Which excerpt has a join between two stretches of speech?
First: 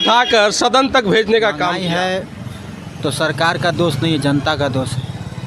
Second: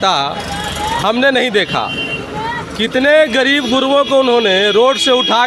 first; 1 cut; at 1.8 s

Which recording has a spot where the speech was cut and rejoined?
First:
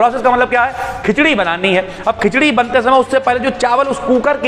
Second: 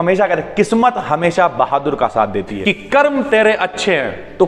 second; 1 cut; at 2.5 s

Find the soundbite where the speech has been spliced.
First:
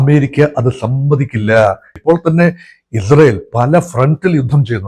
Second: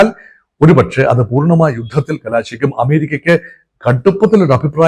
first; 1 cut; at 1.9 s

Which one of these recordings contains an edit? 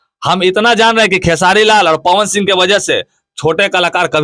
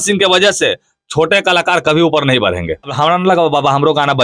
second; 1 cut; at 2.9 s

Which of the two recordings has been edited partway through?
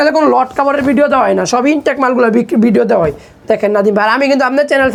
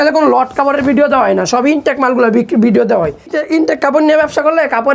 second; 1 cut; at 3.4 s

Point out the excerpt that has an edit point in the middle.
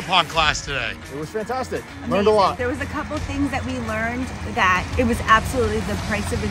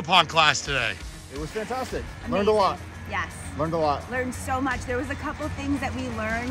first; 3 cuts; at 1.0 s, 2.6 s, 4.9 s

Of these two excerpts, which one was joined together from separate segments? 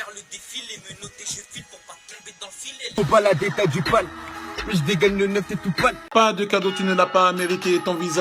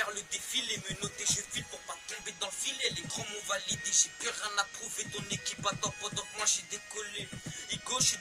first; 2 cuts; at 3.0 s, 6.0 s

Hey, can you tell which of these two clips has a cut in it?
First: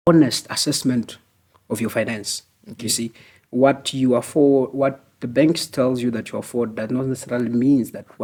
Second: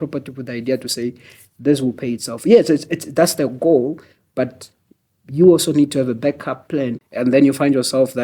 second; 1 cut; at 7.0 s

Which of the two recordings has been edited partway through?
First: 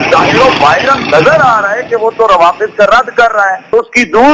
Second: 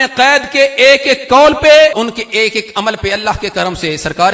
second; 1 cut; at 1.9 s

